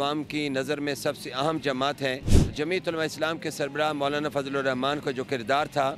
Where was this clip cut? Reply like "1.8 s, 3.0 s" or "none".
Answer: 2.3 s